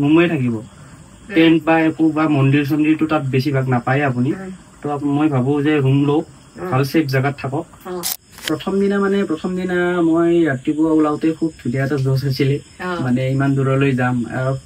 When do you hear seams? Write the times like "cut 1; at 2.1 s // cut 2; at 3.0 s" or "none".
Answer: cut 1; at 8.2 s